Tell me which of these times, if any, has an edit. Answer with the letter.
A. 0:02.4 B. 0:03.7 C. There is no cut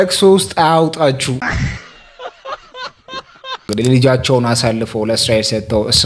B